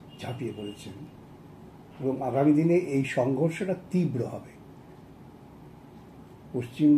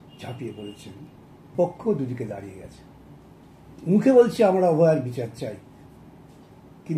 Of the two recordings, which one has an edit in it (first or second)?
second